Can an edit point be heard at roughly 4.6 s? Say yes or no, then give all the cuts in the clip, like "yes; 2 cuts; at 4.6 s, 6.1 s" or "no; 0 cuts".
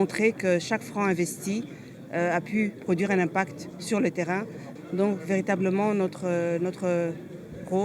yes; 1 cut; at 4.6 s